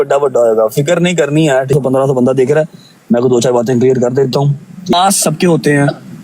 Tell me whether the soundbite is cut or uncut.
cut